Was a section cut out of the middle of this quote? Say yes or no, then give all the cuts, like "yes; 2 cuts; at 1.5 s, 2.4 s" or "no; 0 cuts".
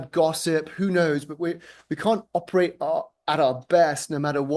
no; 0 cuts